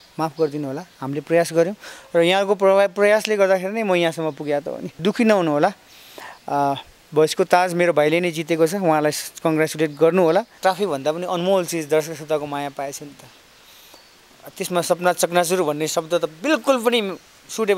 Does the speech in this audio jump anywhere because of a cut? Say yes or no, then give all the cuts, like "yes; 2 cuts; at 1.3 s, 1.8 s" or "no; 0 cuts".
yes; 2 cuts; at 4.9 s, 10.5 s